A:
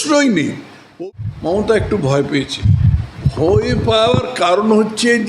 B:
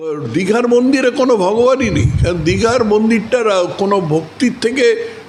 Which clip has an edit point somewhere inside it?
A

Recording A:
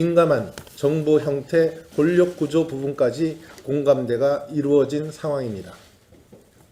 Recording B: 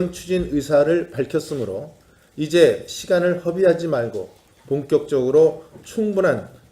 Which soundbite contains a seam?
B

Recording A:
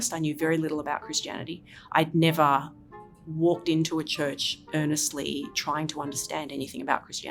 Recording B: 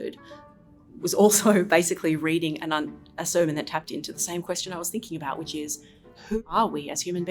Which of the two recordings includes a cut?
B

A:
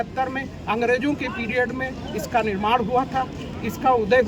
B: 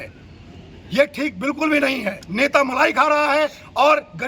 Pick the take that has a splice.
B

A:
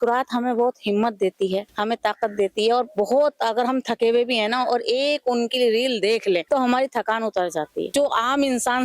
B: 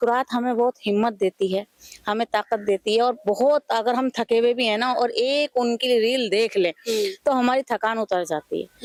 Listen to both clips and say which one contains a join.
A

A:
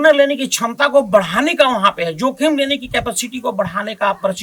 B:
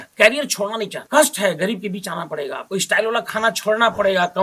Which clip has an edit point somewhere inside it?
B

